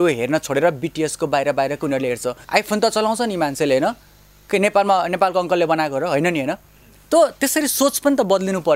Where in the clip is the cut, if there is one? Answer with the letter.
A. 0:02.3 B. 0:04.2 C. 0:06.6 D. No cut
A